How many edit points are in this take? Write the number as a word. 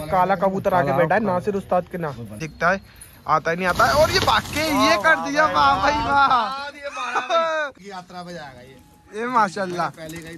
two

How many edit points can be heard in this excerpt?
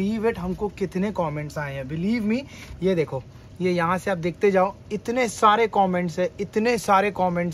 zero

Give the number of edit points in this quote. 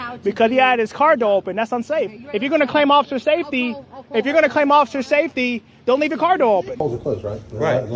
one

